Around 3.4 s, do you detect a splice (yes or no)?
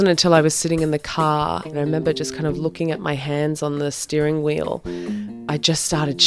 no